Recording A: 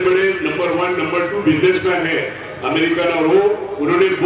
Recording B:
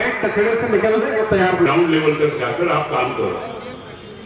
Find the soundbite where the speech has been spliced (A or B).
B